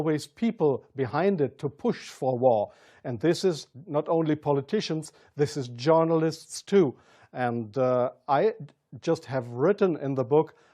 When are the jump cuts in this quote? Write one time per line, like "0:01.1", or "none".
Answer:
0:02.1